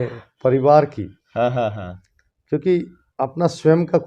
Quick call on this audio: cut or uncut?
uncut